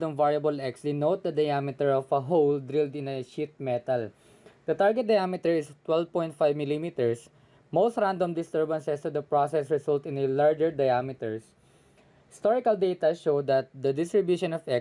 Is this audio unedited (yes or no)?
yes